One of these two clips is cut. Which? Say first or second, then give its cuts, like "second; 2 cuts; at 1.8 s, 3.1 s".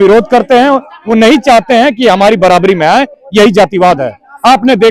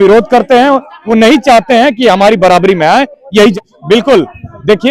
second; 1 cut; at 3.5 s